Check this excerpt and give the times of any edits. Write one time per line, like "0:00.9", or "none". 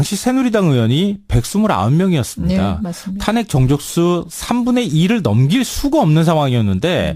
0:05.9